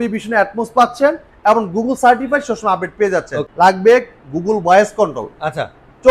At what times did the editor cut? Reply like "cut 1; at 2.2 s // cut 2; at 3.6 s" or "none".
cut 1; at 3.4 s